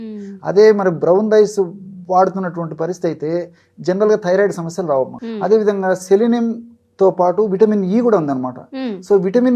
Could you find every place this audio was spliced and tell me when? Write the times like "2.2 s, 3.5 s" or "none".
5.2 s